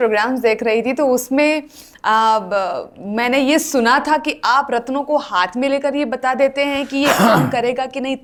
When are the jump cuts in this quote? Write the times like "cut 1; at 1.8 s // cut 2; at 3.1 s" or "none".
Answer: none